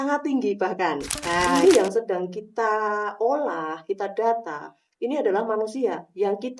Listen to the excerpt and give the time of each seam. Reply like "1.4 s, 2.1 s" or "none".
1.5 s